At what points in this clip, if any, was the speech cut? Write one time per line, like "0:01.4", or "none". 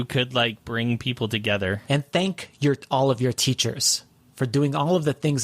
0:02.0